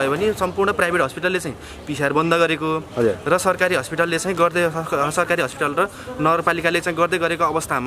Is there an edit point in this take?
no; 0 cuts

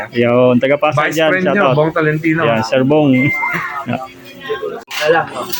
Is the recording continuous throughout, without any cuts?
yes; 0 cuts

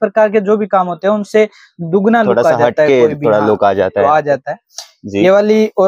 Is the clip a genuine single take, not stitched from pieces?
yes; 0 cuts

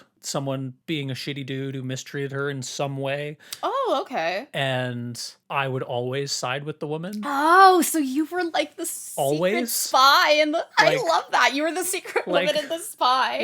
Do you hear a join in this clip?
no; 0 cuts

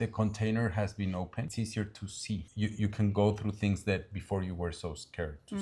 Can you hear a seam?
yes; 2 cuts; at 1.5 s, 2.5 s

